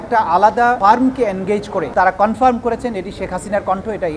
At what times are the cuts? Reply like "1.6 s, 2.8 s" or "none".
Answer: 1.9 s